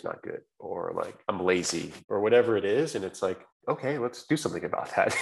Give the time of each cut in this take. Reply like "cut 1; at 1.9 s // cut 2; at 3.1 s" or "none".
cut 1; at 1.2 s // cut 2; at 2.0 s // cut 3; at 3.5 s